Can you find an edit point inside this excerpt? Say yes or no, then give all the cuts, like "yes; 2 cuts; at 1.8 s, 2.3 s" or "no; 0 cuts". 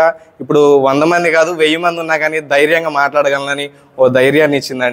no; 0 cuts